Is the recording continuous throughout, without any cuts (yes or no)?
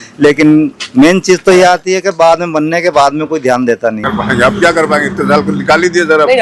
no